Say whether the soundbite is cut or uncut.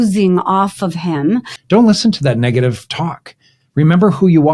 cut